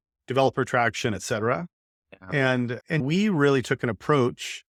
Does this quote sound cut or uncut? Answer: uncut